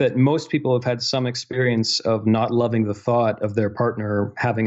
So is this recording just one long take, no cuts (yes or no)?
yes